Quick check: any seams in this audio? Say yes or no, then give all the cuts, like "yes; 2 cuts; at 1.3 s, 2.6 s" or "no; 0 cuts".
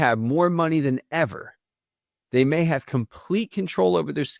no; 0 cuts